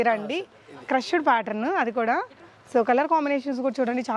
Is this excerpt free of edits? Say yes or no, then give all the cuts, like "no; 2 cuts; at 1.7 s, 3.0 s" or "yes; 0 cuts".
yes; 0 cuts